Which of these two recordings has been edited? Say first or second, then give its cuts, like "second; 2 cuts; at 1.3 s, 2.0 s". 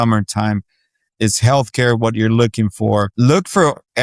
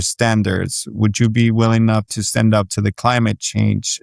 first; 1 cut; at 3.1 s